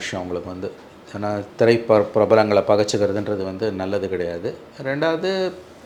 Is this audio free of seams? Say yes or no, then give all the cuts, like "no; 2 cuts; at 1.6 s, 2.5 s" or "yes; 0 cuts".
yes; 0 cuts